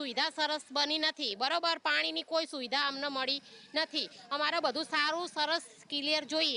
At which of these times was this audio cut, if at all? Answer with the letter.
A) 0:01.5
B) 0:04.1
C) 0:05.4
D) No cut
D